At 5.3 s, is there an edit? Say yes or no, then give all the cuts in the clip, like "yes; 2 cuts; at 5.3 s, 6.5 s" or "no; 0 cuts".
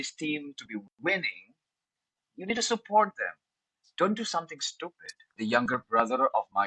yes; 1 cut; at 5.3 s